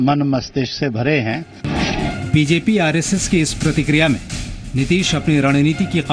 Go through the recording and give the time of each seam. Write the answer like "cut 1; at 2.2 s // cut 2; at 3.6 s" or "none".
none

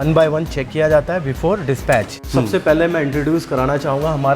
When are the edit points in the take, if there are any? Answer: cut 1; at 2.2 s

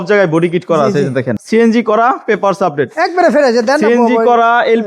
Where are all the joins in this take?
cut 1; at 1.4 s

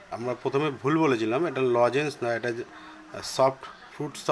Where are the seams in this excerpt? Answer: none

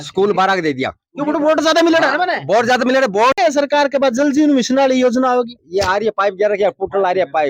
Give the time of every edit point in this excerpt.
cut 1; at 3.4 s

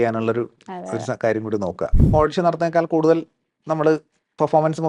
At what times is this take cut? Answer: cut 1; at 2.0 s

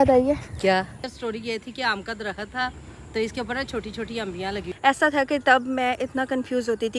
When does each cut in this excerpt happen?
cut 1; at 1.0 s // cut 2; at 4.7 s

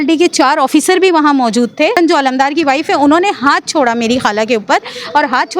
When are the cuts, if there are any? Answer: cut 1; at 1.9 s

